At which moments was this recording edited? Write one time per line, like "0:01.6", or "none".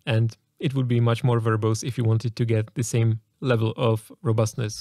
0:03.3